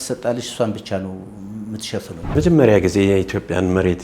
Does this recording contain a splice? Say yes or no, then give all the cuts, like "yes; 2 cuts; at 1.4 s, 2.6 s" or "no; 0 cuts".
yes; 1 cut; at 2.4 s